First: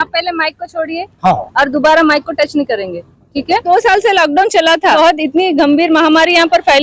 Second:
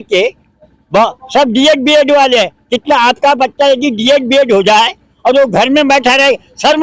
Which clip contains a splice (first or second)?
first